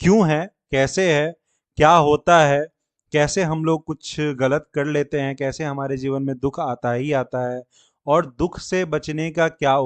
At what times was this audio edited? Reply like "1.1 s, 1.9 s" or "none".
none